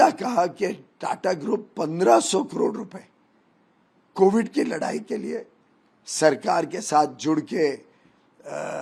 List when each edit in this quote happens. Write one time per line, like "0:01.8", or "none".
none